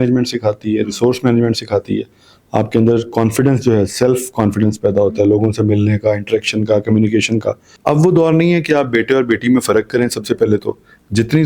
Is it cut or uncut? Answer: cut